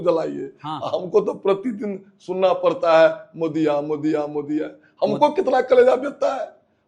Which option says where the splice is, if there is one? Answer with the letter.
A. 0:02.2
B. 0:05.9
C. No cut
C